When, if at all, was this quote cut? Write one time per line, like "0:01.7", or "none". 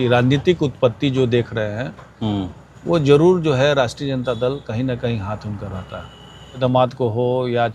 0:06.6